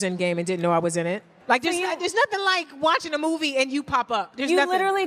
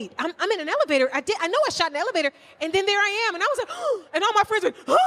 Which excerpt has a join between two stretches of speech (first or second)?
first